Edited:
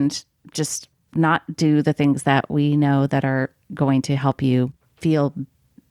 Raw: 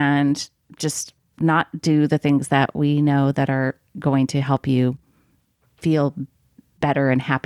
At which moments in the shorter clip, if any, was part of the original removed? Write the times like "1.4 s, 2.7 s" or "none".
4.8 s